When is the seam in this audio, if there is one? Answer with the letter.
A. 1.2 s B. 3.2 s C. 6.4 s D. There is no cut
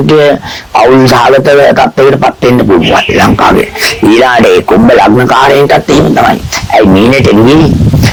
D